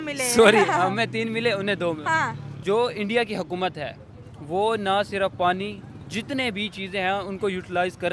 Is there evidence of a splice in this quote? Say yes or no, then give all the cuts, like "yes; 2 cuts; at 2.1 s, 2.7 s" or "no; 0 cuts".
yes; 1 cut; at 2.5 s